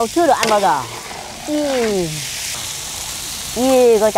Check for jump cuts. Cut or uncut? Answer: cut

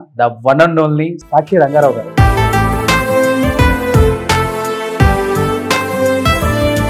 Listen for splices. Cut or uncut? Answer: uncut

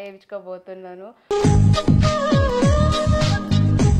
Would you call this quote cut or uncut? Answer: uncut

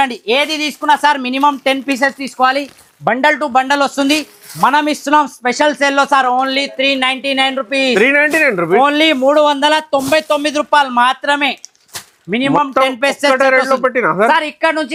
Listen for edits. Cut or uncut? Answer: uncut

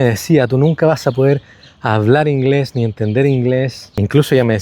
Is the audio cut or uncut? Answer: uncut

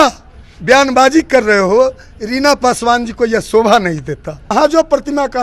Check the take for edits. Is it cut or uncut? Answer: cut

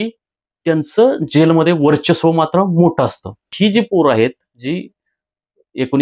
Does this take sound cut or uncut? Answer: cut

